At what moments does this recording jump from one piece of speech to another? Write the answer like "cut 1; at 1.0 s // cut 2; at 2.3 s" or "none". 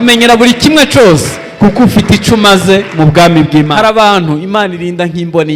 cut 1; at 3.7 s